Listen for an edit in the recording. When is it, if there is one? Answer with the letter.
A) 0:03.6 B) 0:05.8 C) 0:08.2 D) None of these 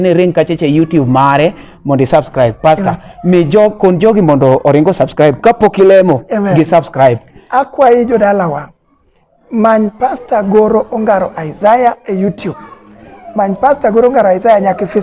D